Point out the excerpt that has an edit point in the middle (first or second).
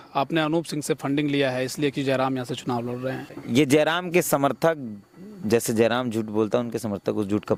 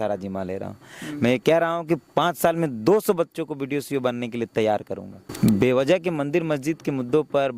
second